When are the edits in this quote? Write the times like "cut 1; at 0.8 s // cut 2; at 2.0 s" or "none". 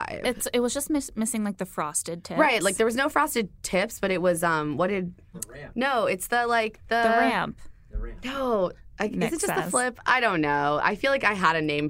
cut 1; at 5.4 s

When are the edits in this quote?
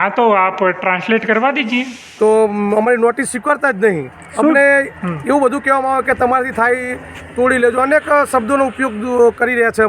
cut 1; at 2.0 s

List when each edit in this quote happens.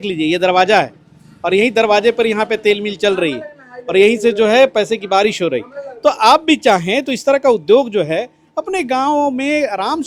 none

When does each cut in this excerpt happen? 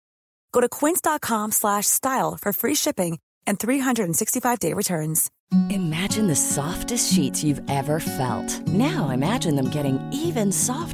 cut 1; at 5.3 s

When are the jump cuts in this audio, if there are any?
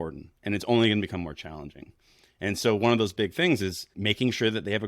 cut 1; at 3.9 s

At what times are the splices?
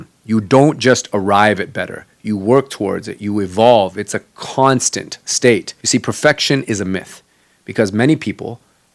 cut 1; at 5.8 s

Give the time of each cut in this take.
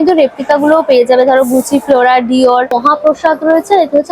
cut 1; at 2.8 s

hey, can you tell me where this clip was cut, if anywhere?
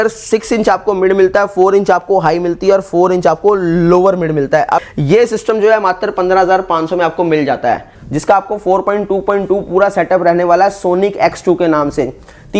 cut 1; at 4.9 s // cut 2; at 7.9 s

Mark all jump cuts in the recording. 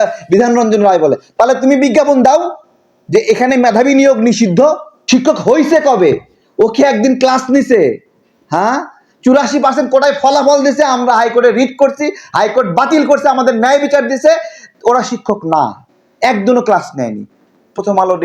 cut 1; at 4.9 s

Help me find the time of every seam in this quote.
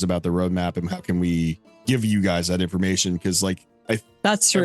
cut 1; at 1.7 s

